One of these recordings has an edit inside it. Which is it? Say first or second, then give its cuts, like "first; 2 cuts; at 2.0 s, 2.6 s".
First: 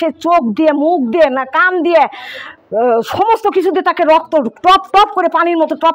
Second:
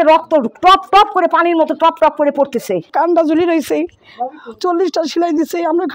second; 1 cut; at 2.9 s